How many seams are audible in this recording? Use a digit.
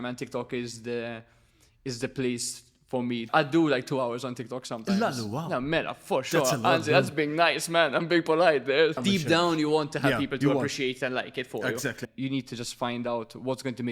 3